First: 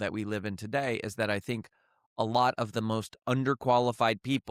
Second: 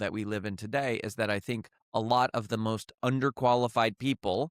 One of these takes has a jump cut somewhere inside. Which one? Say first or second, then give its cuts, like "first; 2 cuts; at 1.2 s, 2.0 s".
second; 1 cut; at 1.7 s